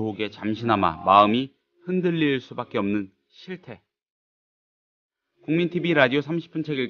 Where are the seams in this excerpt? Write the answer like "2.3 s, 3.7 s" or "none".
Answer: none

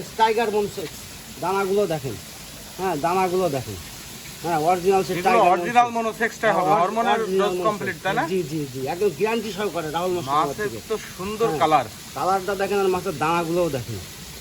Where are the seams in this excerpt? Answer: none

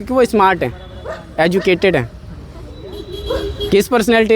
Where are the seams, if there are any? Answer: none

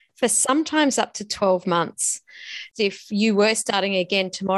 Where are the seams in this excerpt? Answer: 2.7 s

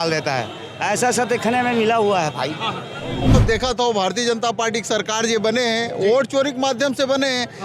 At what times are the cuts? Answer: 3.3 s

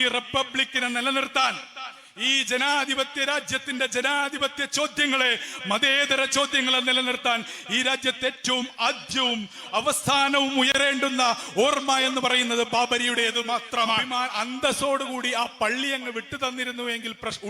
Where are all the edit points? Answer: 14.1 s

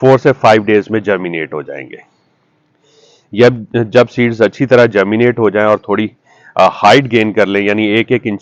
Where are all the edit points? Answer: none

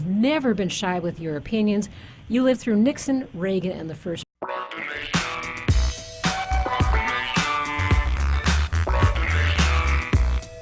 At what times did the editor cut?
none

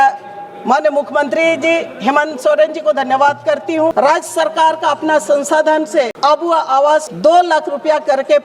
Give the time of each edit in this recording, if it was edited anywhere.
3.9 s, 6.1 s, 7.1 s

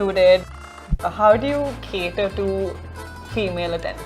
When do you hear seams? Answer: 1.0 s

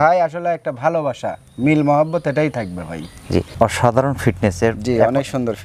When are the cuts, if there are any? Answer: 3.5 s

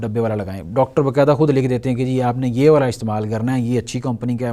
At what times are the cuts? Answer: none

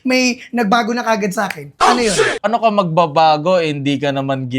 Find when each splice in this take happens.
2.5 s

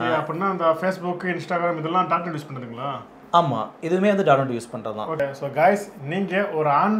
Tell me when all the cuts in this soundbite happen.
5.2 s

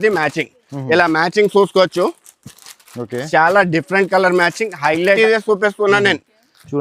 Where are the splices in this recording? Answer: 5.2 s

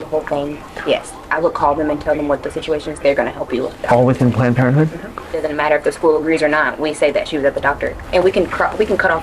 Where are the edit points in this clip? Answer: 5.4 s, 8.0 s

